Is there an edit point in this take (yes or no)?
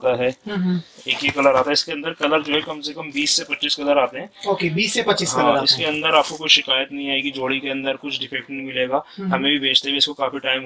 no